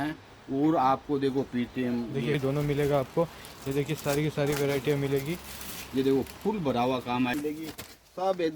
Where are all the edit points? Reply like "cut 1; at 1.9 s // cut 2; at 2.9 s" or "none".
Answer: cut 1; at 2.4 s // cut 2; at 7.3 s

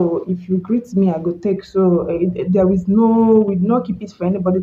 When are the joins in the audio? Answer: none

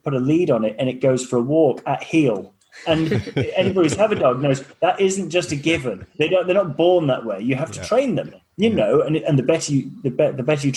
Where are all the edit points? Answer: none

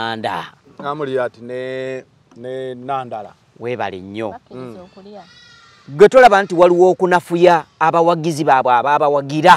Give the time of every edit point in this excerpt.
none

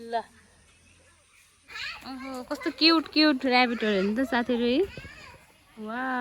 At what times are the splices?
cut 1; at 1.7 s

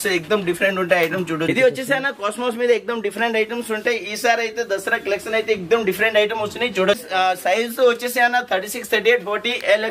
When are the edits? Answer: cut 1; at 1.4 s // cut 2; at 7.0 s

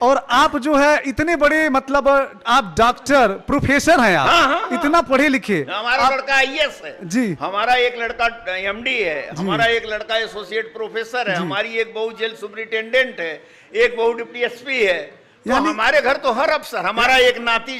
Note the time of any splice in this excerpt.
none

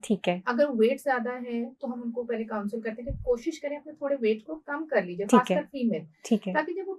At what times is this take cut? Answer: none

